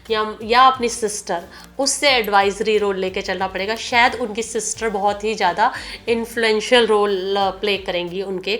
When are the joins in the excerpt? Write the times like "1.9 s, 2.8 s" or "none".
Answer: none